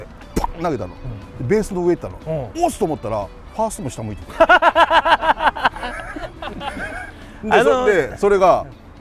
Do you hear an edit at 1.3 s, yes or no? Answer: no